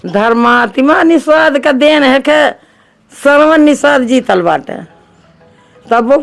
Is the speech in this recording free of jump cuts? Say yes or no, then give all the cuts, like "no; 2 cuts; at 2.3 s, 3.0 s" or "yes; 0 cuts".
yes; 0 cuts